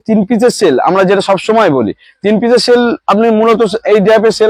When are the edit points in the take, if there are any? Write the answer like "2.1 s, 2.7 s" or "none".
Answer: none